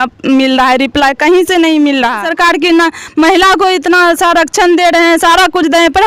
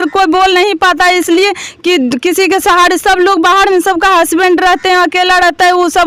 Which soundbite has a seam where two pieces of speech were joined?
first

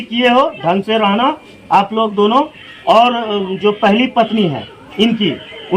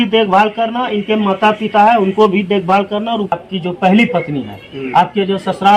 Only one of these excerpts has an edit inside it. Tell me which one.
second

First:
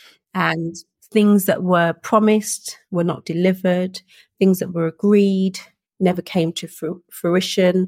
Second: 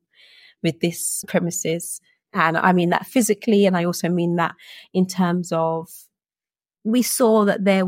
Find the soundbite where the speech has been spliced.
second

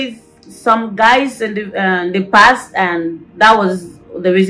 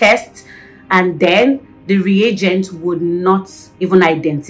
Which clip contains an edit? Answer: first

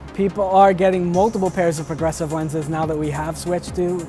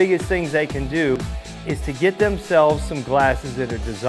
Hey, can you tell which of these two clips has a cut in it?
second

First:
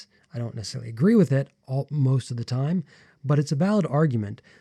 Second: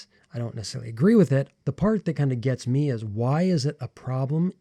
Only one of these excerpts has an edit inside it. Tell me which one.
second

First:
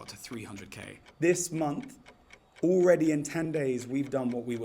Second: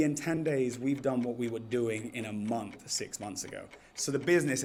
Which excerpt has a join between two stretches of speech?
first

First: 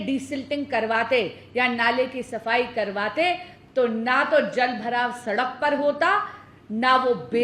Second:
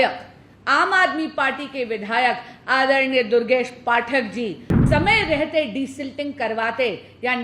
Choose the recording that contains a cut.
second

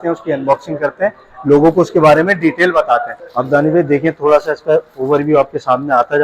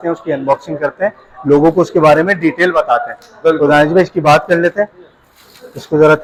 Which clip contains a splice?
first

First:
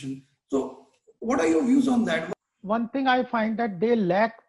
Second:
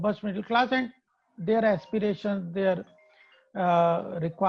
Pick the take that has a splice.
first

